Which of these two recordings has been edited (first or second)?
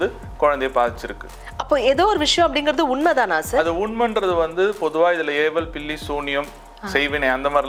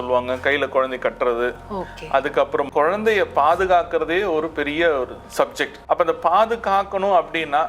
second